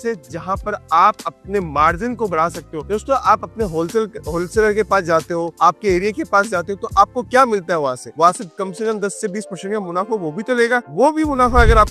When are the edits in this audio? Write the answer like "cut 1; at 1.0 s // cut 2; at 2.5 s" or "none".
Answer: none